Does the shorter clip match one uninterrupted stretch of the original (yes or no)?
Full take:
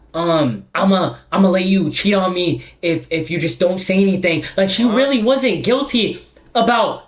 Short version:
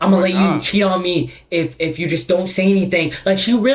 yes